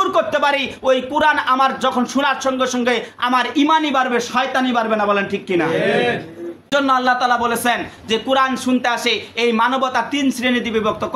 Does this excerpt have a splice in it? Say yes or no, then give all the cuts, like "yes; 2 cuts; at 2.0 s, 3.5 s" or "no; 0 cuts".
yes; 1 cut; at 6.6 s